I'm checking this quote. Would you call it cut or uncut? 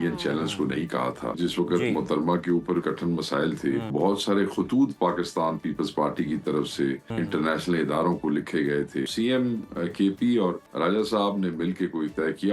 cut